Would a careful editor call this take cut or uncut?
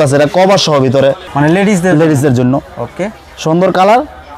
cut